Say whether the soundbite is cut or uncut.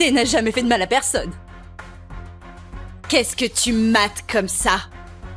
uncut